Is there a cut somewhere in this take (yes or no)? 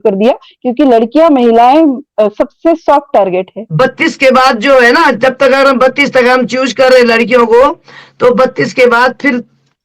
yes